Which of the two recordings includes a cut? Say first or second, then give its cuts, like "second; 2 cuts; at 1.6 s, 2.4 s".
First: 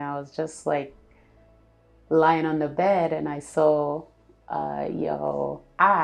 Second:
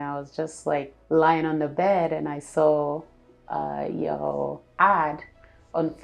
second; 1 cut; at 1.0 s